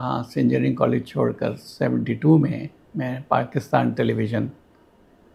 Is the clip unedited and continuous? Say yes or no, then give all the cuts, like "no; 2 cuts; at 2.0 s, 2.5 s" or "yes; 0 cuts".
yes; 0 cuts